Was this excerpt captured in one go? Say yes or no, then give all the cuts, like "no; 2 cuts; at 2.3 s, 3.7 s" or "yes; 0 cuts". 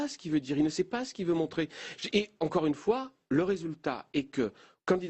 yes; 0 cuts